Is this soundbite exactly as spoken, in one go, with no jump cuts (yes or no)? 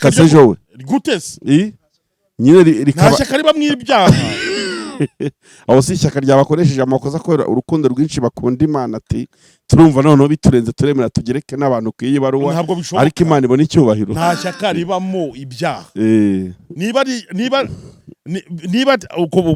yes